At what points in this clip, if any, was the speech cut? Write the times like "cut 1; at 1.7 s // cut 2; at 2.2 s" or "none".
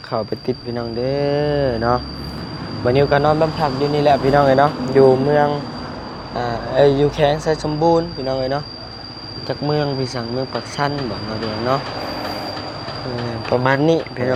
none